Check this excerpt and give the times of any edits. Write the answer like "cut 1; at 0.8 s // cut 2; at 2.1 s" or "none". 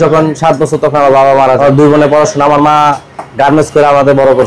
cut 1; at 1.6 s